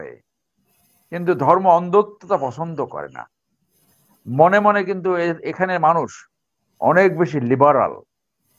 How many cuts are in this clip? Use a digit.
0